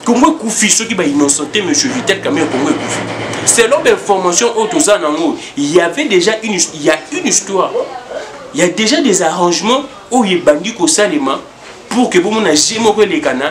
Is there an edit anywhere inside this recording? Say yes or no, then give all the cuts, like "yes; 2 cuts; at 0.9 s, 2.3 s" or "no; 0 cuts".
no; 0 cuts